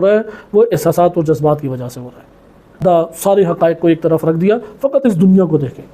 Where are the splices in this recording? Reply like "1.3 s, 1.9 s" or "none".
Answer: 2.8 s